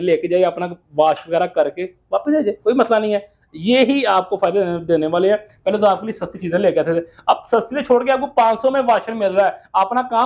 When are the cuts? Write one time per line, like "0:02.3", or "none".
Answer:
none